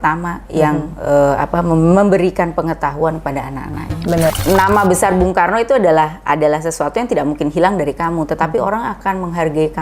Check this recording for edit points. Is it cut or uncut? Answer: cut